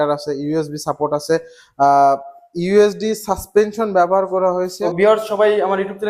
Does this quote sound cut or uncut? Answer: cut